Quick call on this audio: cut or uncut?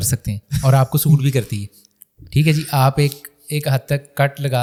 uncut